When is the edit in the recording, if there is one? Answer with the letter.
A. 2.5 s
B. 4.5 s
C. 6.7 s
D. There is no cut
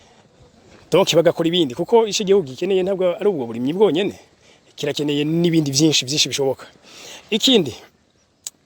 D